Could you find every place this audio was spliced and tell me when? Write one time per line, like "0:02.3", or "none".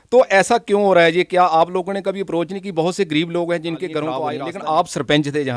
0:04.2